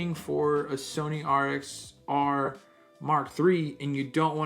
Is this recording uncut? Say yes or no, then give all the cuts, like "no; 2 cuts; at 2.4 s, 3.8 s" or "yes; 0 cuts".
yes; 0 cuts